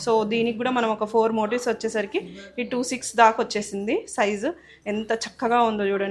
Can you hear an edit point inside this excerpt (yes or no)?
no